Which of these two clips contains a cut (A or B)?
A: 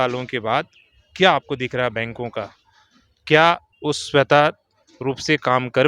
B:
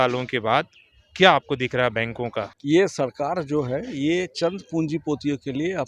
B